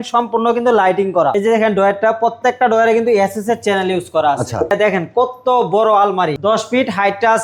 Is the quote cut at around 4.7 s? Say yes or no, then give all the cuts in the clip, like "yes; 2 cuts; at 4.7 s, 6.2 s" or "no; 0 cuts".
yes; 3 cuts; at 1.3 s, 4.7 s, 6.4 s